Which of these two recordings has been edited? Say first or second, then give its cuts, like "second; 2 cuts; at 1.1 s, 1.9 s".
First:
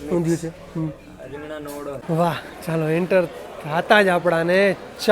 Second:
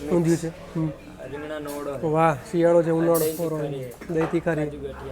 first; 1 cut; at 2.0 s